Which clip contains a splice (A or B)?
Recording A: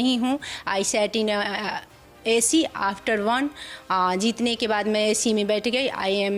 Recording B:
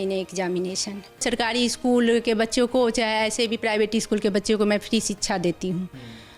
B